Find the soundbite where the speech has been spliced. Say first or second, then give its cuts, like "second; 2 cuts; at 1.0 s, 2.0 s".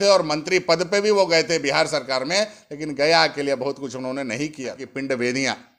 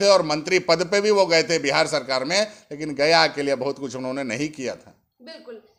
first; 1 cut; at 4.8 s